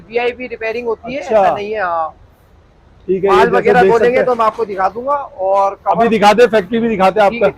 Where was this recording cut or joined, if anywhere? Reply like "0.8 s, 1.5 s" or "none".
none